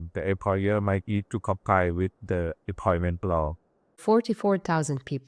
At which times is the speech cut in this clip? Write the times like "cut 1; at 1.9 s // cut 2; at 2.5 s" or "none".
cut 1; at 4.0 s

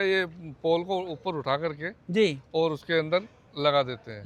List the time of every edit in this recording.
none

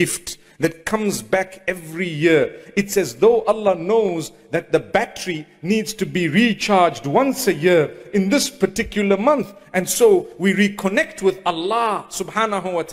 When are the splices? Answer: none

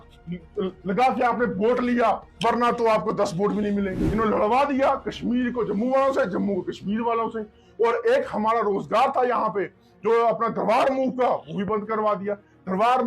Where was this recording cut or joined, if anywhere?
cut 1; at 4.0 s

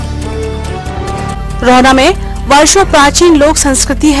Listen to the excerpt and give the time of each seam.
cut 1; at 1.2 s

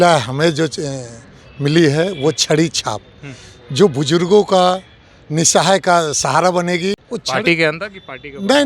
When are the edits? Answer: cut 1; at 7.0 s

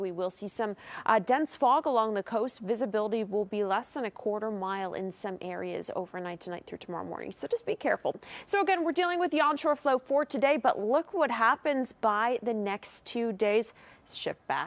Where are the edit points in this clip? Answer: none

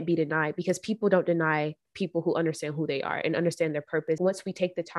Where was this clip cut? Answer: cut 1; at 4.1 s

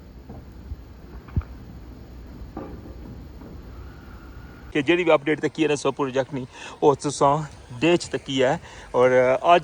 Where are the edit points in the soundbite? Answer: cut 1; at 4.7 s

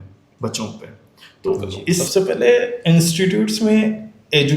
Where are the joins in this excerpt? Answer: cut 1; at 2.1 s

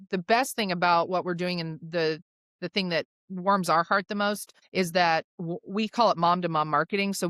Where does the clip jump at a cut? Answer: cut 1; at 4.5 s

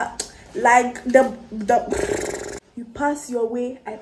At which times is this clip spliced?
cut 1; at 2.6 s

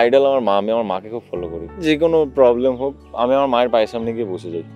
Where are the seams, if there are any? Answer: cut 1; at 1.8 s // cut 2; at 3.0 s

